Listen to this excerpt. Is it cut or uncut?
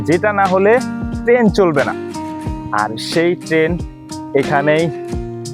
uncut